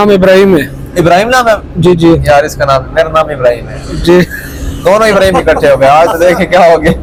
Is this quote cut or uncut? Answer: uncut